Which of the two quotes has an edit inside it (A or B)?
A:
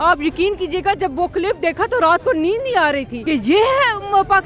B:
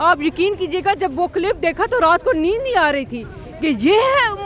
A